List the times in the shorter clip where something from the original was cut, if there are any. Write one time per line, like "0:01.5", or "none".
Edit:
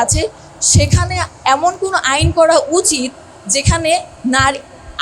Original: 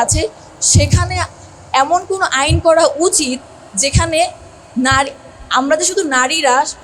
0:01.3
0:04.1